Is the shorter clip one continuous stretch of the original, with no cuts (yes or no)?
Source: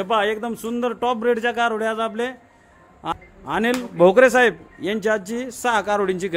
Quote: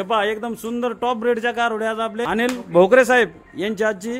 no